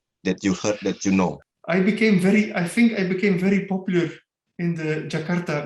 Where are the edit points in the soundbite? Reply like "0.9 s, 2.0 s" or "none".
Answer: 1.4 s